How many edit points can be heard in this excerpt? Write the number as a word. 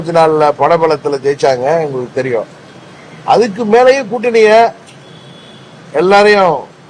zero